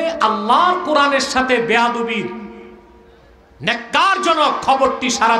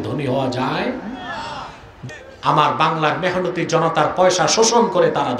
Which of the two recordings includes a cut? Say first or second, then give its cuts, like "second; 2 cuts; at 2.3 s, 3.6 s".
second; 1 cut; at 2.1 s